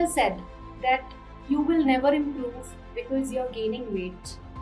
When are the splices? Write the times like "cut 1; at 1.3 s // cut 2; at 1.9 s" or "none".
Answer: none